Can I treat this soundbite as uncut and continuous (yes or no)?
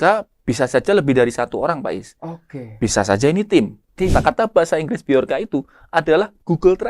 no